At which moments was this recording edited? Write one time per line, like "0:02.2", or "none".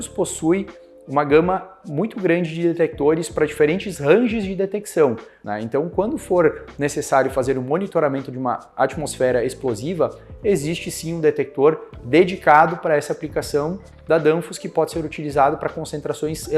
0:05.3